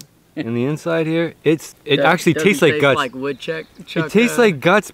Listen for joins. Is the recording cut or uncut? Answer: cut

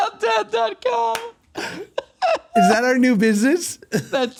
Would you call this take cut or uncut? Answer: uncut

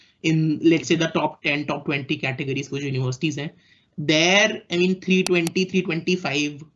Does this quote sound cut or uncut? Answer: uncut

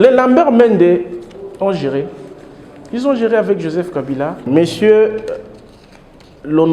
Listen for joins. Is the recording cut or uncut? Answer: cut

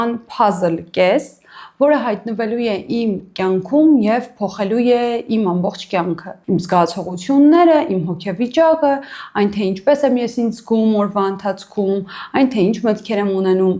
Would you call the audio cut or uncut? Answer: uncut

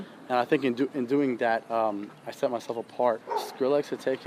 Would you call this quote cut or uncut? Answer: cut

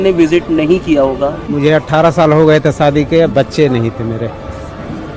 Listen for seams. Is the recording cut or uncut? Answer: cut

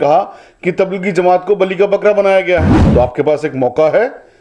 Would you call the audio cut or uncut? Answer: cut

